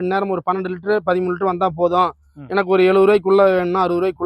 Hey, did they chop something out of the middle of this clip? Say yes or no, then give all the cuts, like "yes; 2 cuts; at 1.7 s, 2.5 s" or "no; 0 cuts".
no; 0 cuts